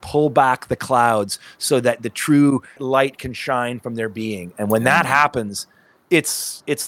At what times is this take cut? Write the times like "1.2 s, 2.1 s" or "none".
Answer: 2.8 s

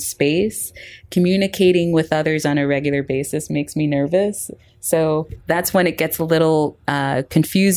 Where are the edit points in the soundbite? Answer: none

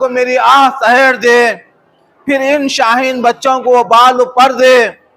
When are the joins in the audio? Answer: 1.2 s

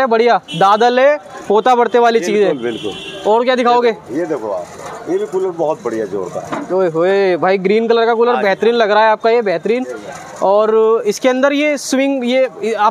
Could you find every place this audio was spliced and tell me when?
none

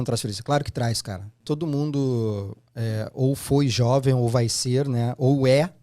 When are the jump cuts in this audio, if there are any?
1.3 s

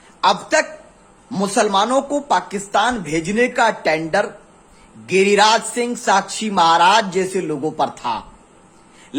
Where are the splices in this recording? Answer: none

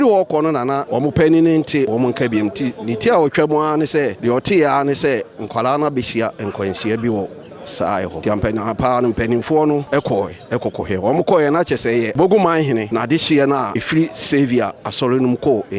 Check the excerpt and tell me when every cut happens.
0.8 s, 1.9 s, 4.2 s, 8.2 s, 9.9 s, 12.1 s, 12.9 s, 13.8 s

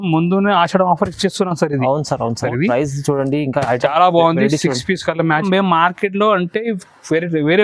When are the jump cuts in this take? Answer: 2.4 s, 5.4 s

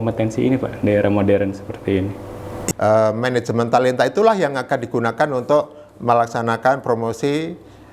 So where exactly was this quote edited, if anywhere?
2.5 s

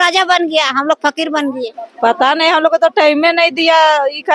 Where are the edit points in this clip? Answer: 1.8 s

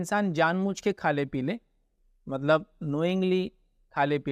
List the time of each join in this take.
none

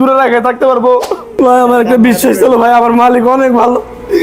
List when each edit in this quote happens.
1.3 s

